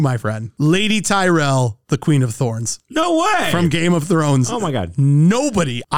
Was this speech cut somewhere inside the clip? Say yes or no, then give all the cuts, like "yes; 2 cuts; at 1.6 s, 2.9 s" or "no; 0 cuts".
no; 0 cuts